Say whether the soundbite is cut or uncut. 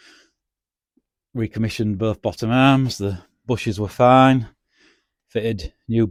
uncut